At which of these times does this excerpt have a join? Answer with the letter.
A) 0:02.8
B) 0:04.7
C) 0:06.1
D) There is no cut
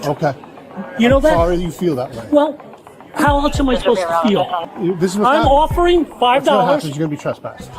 B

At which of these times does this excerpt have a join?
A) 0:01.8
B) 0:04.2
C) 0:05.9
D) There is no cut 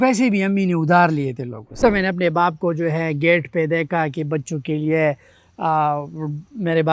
A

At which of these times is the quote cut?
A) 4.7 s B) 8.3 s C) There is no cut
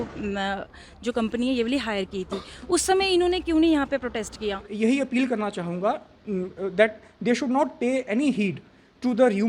A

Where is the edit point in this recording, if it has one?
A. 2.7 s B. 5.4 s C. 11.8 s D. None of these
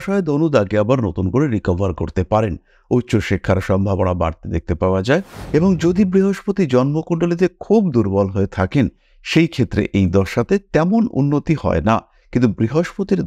B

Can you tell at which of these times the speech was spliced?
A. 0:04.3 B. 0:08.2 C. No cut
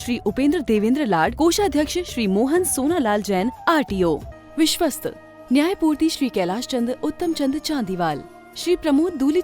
A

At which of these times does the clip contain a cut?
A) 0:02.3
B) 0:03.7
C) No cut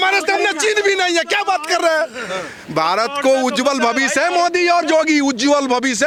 C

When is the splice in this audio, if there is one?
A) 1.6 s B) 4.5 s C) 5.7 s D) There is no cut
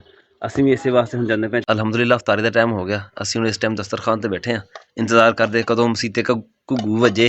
A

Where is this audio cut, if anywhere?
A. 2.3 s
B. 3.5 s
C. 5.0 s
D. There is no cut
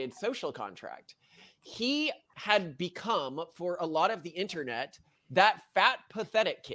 A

